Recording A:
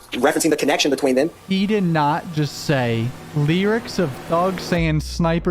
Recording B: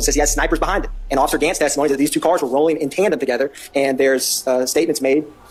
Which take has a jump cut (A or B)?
A